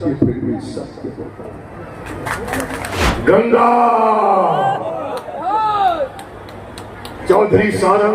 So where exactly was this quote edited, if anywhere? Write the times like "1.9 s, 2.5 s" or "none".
3.0 s